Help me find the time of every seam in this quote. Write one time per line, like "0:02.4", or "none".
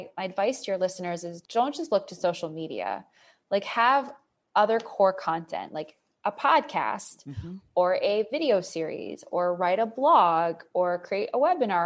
0:01.3